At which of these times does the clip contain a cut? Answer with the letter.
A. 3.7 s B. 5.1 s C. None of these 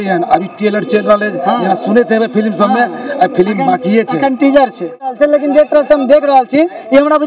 B